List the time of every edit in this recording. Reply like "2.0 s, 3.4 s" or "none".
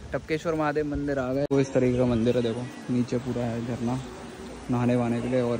1.5 s

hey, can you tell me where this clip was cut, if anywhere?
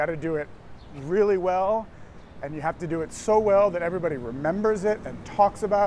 none

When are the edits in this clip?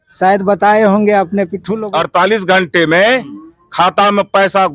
1.8 s

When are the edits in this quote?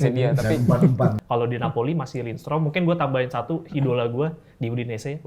1.2 s

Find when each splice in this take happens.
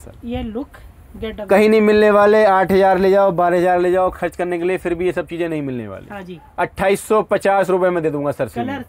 none

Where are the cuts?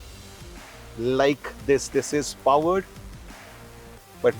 none

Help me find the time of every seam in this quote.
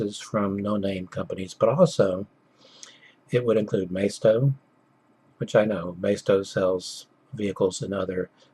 6.5 s

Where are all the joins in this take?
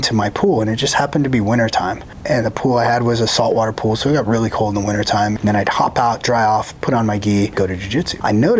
2.1 s, 5.3 s, 7.8 s

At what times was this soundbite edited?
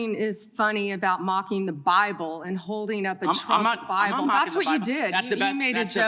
none

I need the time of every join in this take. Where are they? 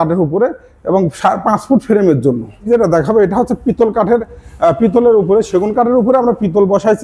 2.7 s

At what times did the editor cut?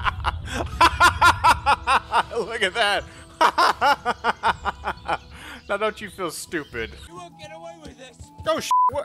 7.0 s

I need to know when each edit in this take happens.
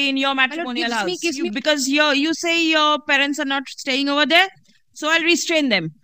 1.5 s

